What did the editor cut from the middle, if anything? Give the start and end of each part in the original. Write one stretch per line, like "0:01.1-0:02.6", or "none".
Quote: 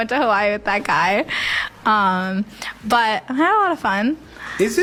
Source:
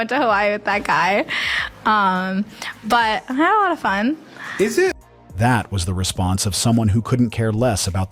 none